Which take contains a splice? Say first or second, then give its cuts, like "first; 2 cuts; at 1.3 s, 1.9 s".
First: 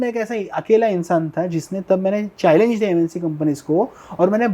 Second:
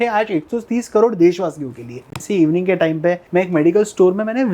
second; 2 cuts; at 2.2 s, 3.2 s